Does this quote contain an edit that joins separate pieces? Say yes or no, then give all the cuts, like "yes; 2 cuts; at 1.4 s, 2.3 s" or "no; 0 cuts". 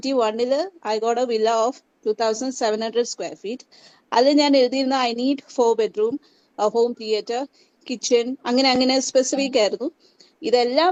no; 0 cuts